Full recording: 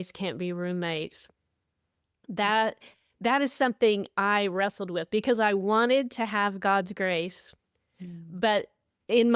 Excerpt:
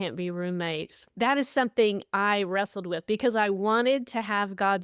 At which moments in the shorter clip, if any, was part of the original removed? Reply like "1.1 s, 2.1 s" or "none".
1.0 s